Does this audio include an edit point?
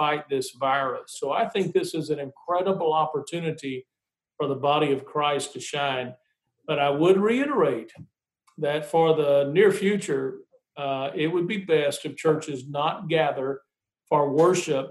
yes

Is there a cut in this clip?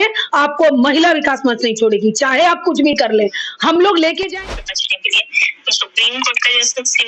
yes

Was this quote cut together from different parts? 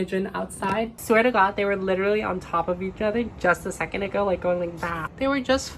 yes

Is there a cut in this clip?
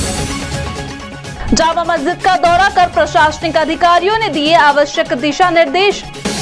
yes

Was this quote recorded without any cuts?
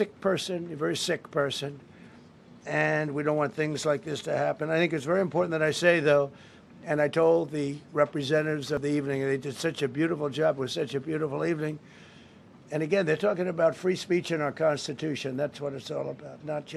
yes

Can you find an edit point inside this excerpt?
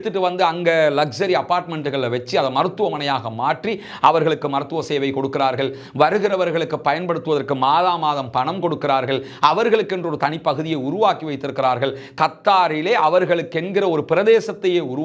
no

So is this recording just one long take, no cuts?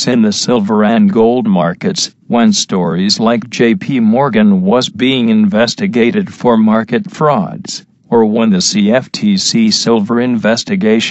no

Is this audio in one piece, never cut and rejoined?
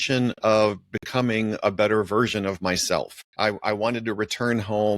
no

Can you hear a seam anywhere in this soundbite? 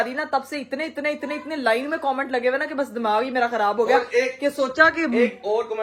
no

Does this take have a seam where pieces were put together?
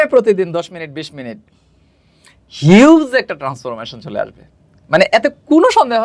no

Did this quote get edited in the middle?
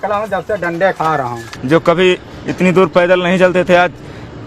yes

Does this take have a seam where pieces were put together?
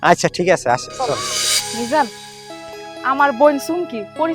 yes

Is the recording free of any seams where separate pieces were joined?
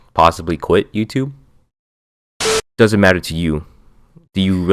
no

